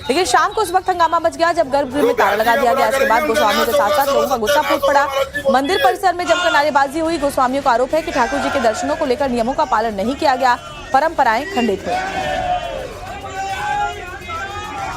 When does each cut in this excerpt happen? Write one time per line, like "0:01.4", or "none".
0:11.0